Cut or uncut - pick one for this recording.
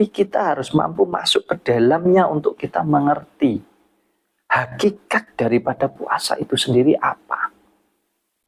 uncut